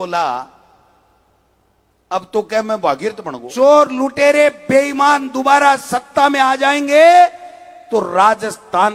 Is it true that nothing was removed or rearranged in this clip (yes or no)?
no